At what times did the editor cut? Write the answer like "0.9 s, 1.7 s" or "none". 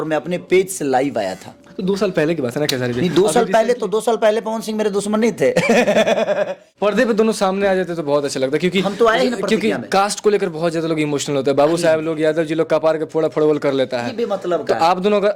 6.6 s